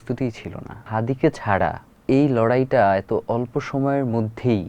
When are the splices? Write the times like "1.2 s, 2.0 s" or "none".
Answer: 0.9 s, 1.9 s